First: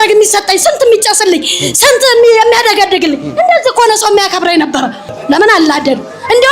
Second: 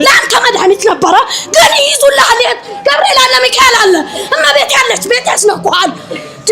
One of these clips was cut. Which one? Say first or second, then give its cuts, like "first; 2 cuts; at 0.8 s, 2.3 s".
first; 1 cut; at 5.1 s